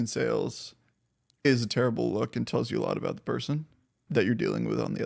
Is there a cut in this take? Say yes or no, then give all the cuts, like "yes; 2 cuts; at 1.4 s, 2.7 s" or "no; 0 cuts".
yes; 2 cuts; at 1.5 s, 4.0 s